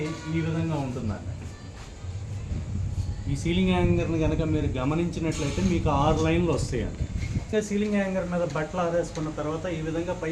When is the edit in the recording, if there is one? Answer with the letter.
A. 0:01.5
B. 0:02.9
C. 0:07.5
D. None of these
C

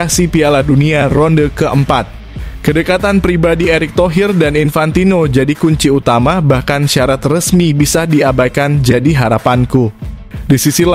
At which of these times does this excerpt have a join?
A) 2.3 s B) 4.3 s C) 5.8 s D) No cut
D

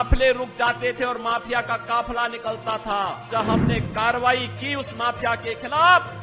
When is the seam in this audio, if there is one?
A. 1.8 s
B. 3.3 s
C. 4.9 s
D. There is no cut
B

